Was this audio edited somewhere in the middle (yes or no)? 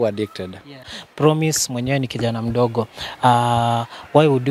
yes